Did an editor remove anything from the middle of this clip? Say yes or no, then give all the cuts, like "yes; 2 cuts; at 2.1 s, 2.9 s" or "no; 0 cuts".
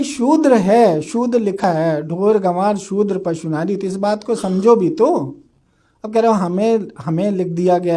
yes; 1 cut; at 1.6 s